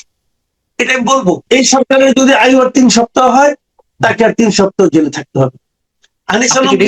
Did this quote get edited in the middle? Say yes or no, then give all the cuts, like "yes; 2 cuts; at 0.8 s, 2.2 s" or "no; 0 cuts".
yes; 1 cut; at 1.4 s